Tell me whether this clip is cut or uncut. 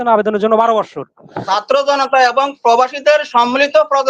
cut